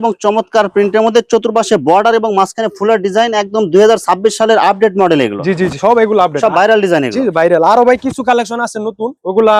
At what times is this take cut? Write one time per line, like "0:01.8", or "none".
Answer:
none